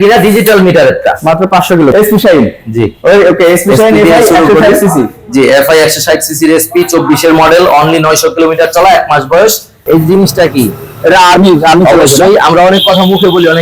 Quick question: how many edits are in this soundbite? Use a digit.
2